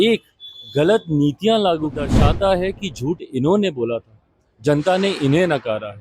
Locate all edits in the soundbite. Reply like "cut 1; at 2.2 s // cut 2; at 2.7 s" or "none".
cut 1; at 2.1 s